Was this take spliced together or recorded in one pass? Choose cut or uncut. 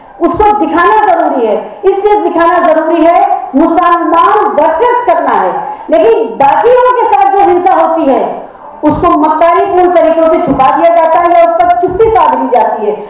uncut